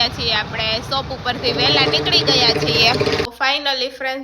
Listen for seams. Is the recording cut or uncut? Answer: cut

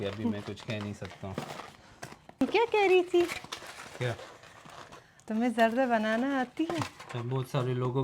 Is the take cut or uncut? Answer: cut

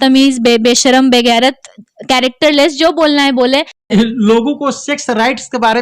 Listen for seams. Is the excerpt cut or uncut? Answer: cut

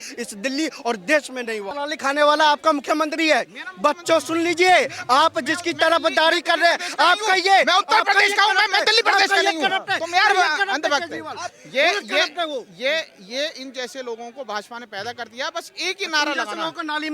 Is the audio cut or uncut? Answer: cut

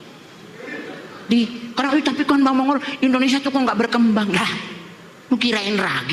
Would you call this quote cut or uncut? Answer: uncut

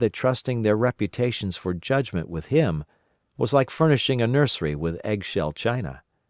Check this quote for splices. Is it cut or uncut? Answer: uncut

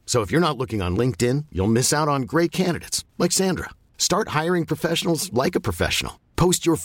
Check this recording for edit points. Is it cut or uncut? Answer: uncut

